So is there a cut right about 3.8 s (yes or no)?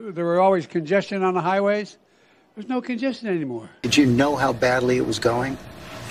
yes